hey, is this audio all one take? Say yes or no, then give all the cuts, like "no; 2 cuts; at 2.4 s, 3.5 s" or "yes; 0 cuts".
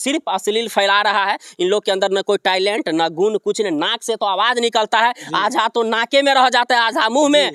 yes; 0 cuts